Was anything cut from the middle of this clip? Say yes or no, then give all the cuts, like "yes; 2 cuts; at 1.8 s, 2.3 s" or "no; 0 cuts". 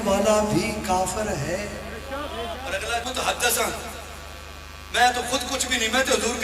yes; 1 cut; at 3.0 s